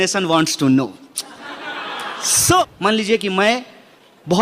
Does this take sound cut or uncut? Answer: cut